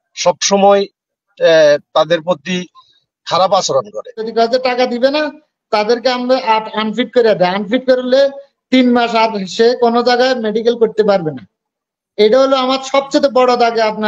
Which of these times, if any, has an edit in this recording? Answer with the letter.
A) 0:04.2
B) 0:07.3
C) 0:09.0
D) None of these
A